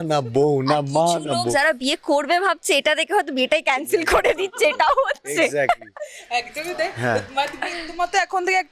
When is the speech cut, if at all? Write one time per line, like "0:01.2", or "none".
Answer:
none